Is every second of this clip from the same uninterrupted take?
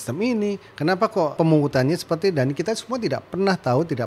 no; 1 cut; at 1.3 s

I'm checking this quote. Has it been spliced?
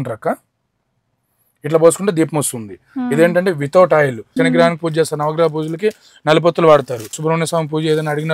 yes; 2 cuts; at 4.2 s, 7.1 s

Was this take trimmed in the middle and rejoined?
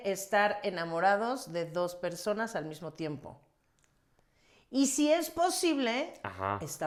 no; 0 cuts

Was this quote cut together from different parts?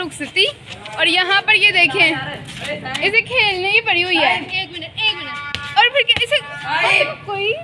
no; 0 cuts

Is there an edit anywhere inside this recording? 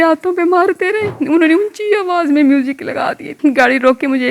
yes; 2 cuts; at 1.2 s, 3.3 s

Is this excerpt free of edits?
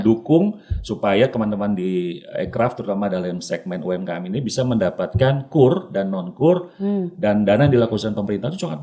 yes; 0 cuts

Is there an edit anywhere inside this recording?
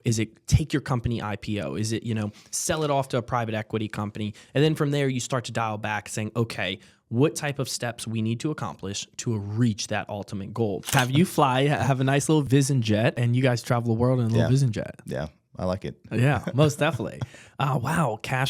yes; 3 cuts; at 10.9 s, 12.5 s, 13.2 s

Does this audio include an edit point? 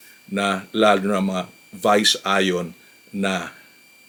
no; 0 cuts

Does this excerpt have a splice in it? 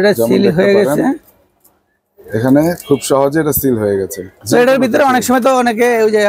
no; 0 cuts

